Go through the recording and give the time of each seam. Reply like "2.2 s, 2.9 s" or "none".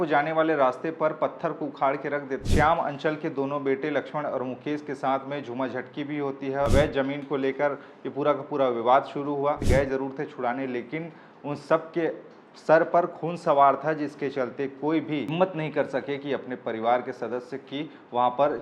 2.4 s, 6.7 s, 9.6 s, 15.3 s